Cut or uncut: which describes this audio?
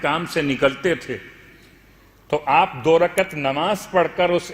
uncut